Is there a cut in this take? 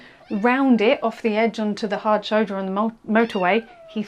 no; 0 cuts

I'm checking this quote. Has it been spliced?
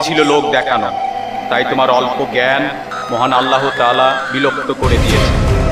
no; 0 cuts

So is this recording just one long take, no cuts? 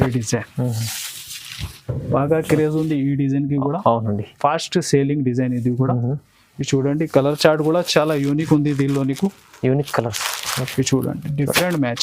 yes; 0 cuts

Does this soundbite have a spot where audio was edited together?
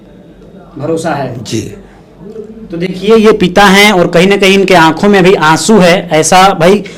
no; 0 cuts

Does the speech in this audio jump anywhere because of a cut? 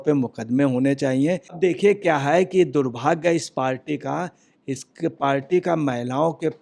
no; 0 cuts

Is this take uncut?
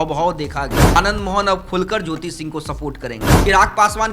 no; 2 cuts; at 1.0 s, 3.3 s

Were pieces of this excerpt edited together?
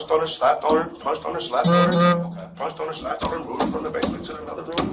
no; 0 cuts

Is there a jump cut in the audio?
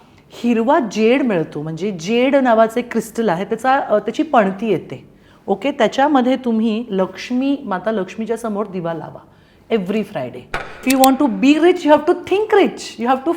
yes; 1 cut; at 10.7 s

